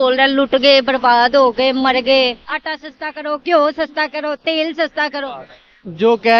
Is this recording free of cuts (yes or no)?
yes